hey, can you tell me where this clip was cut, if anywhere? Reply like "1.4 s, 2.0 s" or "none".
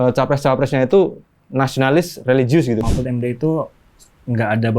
2.8 s